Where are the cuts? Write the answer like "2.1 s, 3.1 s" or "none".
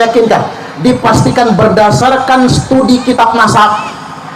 none

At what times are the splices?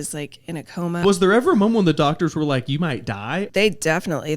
1.0 s, 3.5 s

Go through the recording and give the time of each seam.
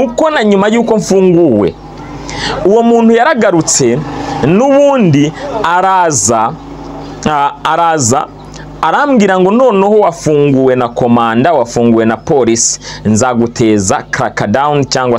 none

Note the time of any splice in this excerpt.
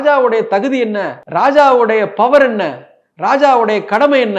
1.1 s

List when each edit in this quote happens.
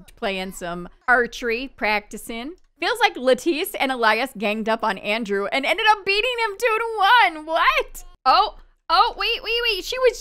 2.6 s, 8.0 s

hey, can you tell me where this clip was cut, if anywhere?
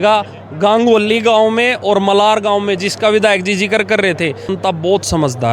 4.5 s

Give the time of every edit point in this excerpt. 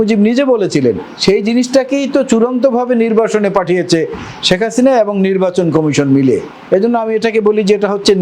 1.1 s, 6.5 s

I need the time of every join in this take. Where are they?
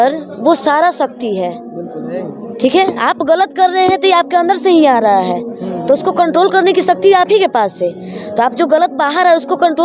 none

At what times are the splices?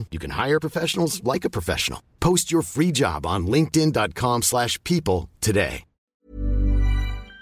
6.1 s

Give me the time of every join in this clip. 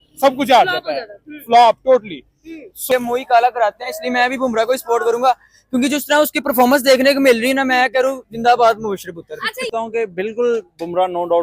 2.8 s, 9.7 s

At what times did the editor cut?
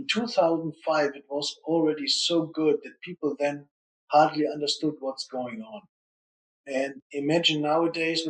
7.0 s

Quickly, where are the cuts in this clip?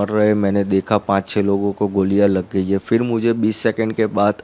none

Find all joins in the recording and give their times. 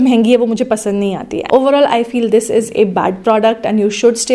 1.3 s

